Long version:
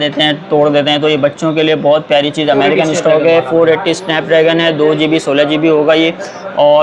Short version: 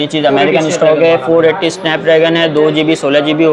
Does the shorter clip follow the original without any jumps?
yes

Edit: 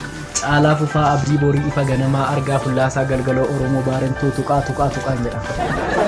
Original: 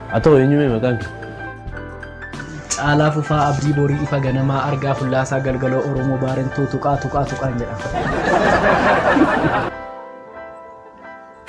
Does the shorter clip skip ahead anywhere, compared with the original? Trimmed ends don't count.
no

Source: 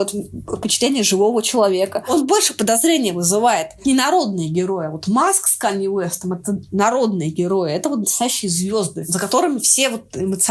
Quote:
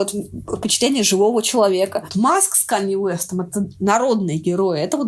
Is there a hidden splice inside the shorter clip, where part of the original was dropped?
yes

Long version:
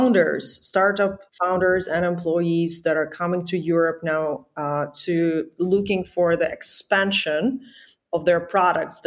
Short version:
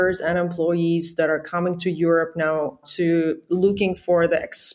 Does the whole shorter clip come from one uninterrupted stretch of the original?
no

